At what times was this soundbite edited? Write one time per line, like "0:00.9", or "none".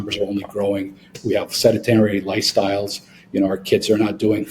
0:01.1